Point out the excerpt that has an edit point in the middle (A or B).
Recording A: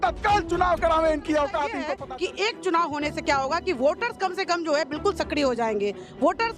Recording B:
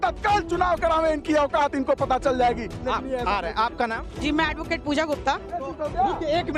A